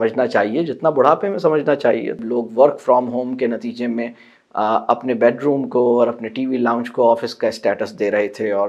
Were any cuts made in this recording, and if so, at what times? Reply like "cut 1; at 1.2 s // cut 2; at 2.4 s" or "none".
cut 1; at 2.2 s